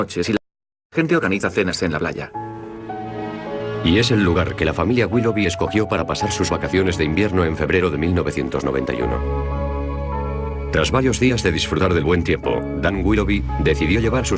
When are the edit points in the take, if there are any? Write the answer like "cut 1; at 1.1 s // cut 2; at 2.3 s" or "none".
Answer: cut 1; at 10.2 s